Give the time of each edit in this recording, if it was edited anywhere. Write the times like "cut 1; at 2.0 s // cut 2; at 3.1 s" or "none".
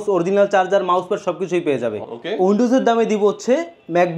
cut 1; at 2.0 s

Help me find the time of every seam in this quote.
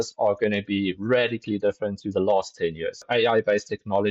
cut 1; at 3.1 s

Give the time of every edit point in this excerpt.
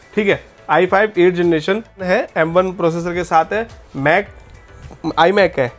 cut 1; at 2.0 s

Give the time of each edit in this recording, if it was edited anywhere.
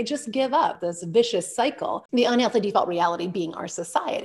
cut 1; at 0.8 s // cut 2; at 2.0 s

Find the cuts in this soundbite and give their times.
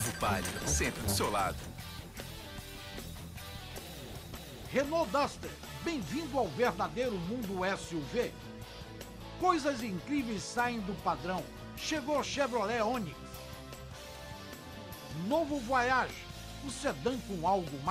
none

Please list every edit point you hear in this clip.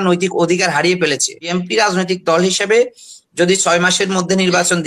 cut 1; at 1.4 s

